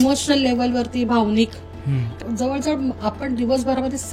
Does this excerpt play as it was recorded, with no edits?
no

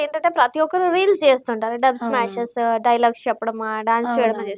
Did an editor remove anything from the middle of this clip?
no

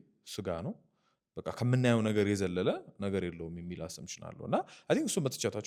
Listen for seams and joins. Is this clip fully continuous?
yes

